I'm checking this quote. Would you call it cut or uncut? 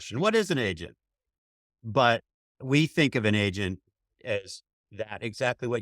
uncut